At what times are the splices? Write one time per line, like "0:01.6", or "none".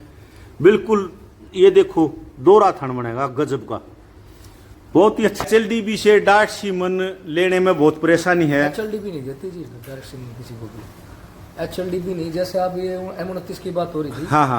0:05.4